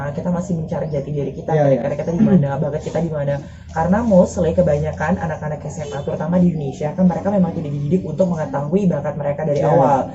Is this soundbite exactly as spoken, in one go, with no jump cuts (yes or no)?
yes